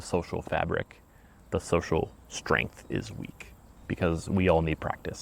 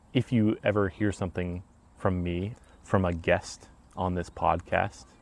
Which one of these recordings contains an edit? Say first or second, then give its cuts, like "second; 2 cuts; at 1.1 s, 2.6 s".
second; 1 cut; at 2.5 s